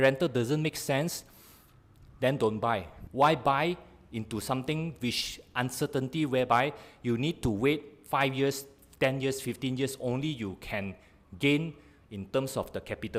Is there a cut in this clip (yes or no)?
no